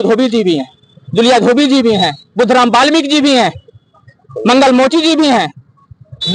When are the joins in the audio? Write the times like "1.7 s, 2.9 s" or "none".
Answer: none